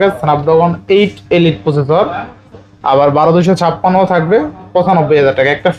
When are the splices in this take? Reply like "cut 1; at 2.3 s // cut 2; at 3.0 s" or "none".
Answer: none